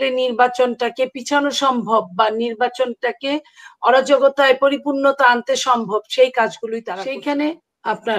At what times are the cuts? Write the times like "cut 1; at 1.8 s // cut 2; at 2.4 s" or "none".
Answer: cut 1; at 6.9 s